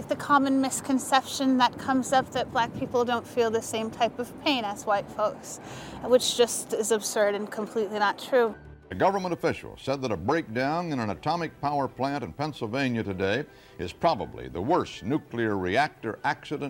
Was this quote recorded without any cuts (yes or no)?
no